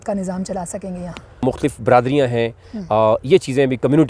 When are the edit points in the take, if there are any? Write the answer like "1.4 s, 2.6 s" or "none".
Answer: 1.4 s